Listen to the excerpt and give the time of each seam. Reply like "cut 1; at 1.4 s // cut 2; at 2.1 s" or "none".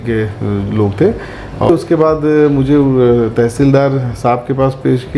cut 1; at 1.7 s